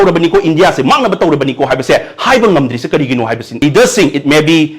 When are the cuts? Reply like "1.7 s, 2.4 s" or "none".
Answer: 3.6 s